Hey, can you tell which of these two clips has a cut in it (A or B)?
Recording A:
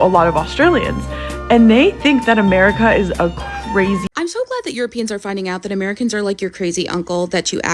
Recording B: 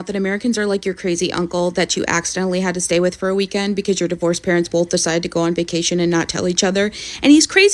A